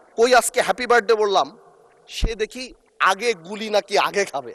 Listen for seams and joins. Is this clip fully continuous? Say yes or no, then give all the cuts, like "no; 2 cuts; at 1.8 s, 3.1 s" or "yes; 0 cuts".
yes; 0 cuts